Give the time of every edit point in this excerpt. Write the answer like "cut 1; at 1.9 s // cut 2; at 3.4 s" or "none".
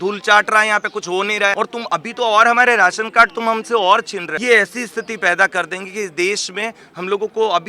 cut 1; at 1.5 s // cut 2; at 4.2 s